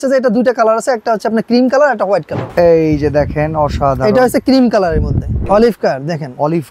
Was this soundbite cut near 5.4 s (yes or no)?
yes